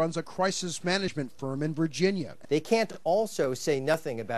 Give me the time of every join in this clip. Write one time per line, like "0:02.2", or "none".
0:02.3